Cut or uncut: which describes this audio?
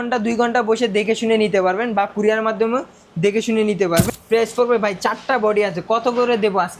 cut